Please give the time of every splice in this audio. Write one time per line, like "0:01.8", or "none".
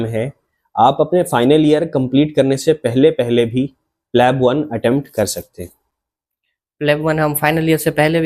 none

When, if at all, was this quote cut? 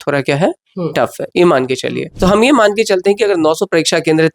0:02.0

